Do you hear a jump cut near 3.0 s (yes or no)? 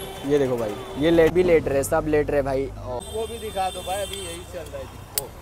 yes